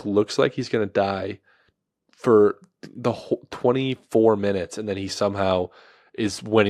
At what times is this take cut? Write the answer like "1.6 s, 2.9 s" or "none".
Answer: none